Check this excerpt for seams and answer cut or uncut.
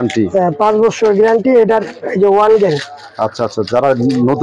uncut